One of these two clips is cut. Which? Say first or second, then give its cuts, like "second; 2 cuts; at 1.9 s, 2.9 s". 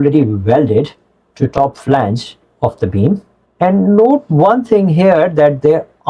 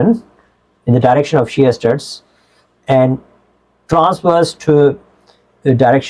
first; 1 cut; at 3.4 s